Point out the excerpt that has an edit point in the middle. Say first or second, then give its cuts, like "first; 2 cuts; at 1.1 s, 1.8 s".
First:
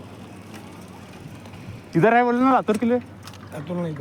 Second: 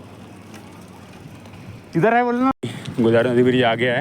second; 1 cut; at 2.5 s